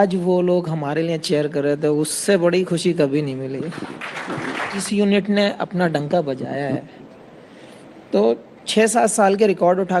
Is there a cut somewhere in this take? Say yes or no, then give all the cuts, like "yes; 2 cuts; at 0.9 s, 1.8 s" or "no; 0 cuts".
yes; 1 cut; at 4.9 s